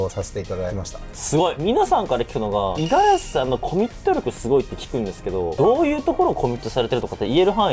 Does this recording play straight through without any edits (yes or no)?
yes